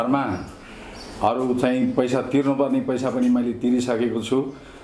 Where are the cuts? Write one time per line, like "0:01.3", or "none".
none